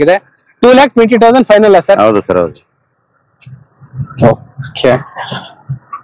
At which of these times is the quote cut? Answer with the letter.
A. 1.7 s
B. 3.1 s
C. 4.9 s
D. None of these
D